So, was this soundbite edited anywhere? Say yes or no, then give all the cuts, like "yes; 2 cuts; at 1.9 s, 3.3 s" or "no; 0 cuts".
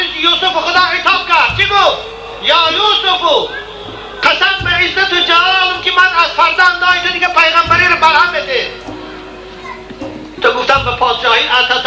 no; 0 cuts